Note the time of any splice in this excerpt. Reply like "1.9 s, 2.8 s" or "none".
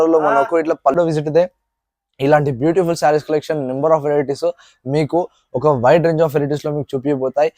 0.9 s